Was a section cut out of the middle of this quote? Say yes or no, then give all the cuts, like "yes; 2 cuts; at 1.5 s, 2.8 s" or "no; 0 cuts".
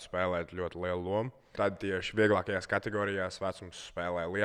yes; 1 cut; at 1.4 s